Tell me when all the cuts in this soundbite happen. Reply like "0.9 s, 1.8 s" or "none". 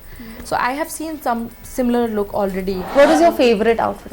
2.9 s